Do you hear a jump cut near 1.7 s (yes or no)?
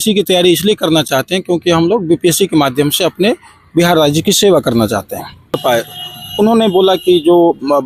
no